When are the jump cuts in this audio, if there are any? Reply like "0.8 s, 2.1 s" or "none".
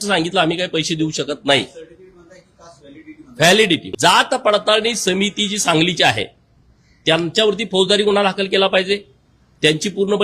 3.9 s